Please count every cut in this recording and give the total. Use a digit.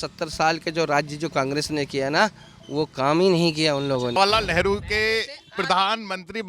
1